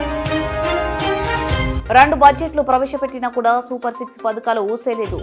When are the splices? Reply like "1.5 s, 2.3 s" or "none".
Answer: 1.8 s